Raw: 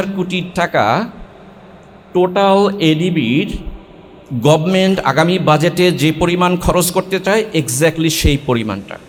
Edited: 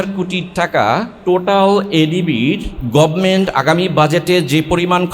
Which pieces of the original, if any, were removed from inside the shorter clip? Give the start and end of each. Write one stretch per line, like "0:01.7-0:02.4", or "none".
0:01.1-0:02.0
0:03.6-0:04.2